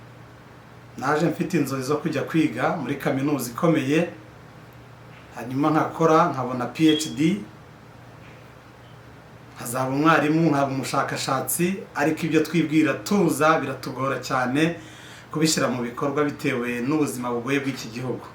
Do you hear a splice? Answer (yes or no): no